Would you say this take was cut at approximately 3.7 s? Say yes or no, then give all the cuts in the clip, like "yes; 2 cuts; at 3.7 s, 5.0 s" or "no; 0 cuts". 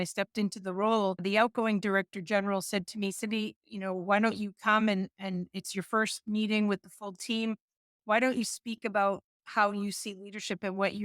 no; 1 cut; at 1.2 s